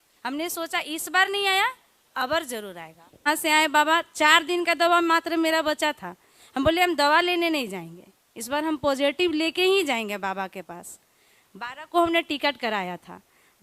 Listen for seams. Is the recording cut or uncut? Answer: cut